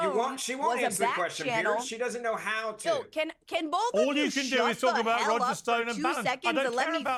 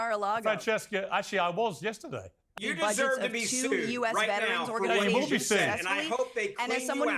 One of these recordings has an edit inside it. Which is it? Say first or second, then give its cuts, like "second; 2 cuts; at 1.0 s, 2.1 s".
second; 1 cut; at 2.4 s